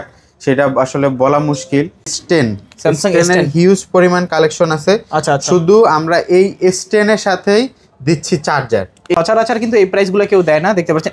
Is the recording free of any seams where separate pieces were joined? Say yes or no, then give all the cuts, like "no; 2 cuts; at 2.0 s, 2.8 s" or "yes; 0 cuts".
no; 2 cuts; at 2.2 s, 9.1 s